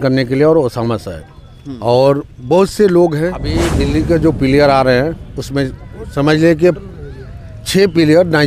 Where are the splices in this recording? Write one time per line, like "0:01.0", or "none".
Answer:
0:03.7